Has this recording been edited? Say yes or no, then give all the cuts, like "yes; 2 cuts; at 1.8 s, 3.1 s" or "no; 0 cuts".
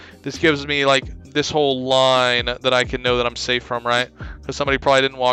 no; 0 cuts